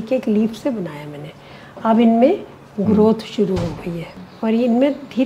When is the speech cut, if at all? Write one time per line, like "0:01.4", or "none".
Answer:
0:04.2